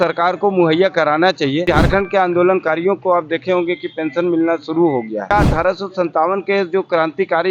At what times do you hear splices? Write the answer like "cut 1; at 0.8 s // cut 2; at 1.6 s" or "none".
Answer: cut 1; at 1.6 s // cut 2; at 5.3 s